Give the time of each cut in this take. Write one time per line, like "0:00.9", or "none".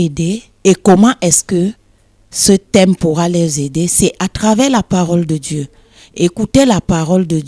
none